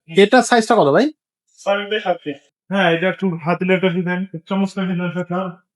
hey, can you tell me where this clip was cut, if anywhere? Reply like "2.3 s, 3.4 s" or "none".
2.4 s